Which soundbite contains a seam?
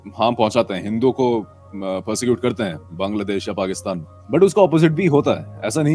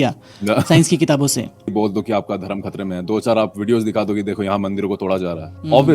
second; 1 cut; at 1.7 s

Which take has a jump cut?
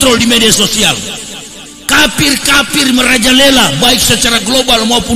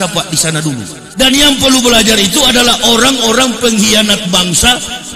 second; 1 cut; at 1.0 s

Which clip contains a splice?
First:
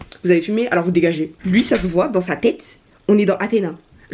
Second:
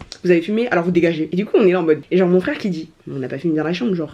first; 1 cut; at 1.3 s

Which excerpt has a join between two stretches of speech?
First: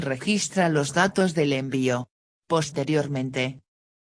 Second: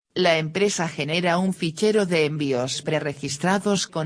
second; 1 cut; at 0.9 s

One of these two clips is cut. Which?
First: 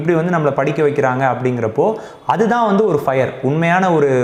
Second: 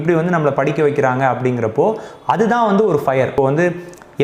second; 1 cut; at 3.3 s

